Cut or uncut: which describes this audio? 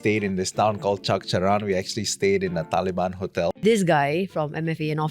cut